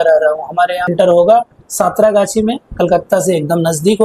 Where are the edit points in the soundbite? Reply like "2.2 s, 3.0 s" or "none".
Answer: 0.9 s